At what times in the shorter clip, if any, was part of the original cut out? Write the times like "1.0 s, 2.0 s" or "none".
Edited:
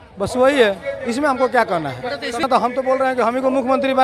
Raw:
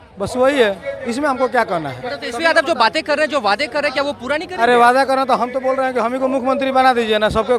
2.4 s